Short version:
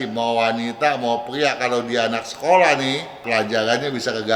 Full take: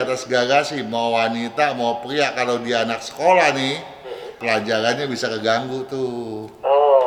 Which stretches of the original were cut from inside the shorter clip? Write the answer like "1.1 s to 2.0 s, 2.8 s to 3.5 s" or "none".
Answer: 3.9 s to 4.3 s